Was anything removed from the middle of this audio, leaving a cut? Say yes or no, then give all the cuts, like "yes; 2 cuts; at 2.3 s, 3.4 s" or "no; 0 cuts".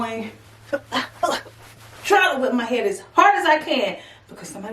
yes; 1 cut; at 1.3 s